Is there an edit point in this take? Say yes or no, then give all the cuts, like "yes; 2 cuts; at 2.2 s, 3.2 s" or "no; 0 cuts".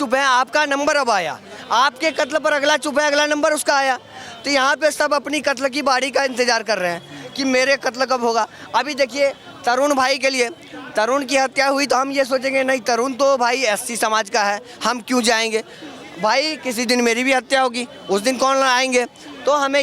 no; 0 cuts